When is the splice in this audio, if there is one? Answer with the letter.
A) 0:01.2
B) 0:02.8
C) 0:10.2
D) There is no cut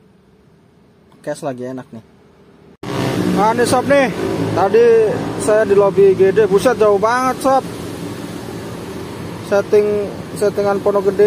B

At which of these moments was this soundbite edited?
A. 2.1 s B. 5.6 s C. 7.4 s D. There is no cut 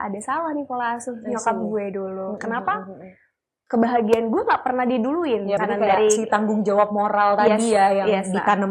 B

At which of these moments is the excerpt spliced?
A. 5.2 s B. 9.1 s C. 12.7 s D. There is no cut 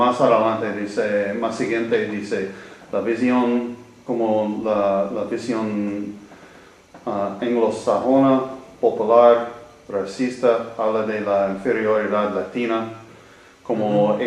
C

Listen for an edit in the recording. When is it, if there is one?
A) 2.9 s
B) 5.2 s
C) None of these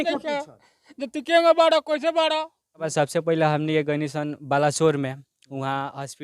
A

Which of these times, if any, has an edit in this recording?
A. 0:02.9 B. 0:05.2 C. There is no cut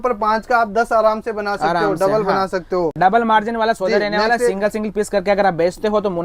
C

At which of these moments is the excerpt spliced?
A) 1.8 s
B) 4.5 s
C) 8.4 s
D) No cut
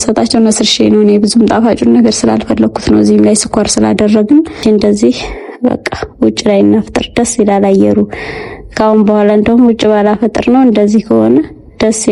B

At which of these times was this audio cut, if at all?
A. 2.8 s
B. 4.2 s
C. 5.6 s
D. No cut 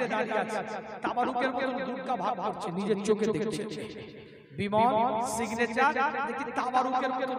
D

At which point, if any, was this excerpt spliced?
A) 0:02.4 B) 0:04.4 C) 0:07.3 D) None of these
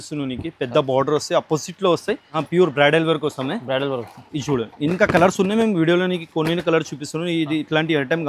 A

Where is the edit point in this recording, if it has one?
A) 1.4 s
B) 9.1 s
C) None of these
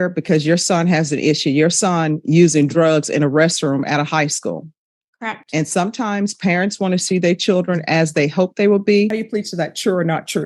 B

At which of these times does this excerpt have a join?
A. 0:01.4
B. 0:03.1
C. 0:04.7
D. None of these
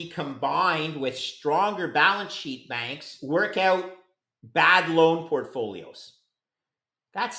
B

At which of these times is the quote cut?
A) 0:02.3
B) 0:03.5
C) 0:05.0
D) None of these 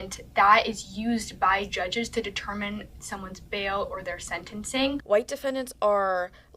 C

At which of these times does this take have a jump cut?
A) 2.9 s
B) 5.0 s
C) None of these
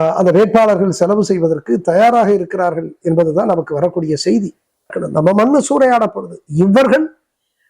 B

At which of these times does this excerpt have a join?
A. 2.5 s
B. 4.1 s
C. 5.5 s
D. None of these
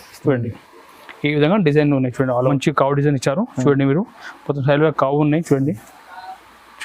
A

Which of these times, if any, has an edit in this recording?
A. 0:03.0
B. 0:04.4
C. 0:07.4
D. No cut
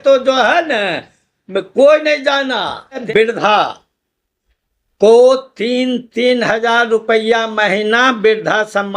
A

